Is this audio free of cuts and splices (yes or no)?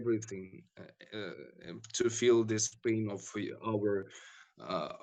yes